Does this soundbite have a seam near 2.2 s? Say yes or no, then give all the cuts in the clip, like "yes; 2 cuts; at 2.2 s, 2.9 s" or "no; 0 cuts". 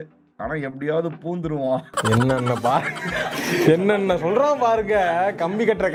no; 0 cuts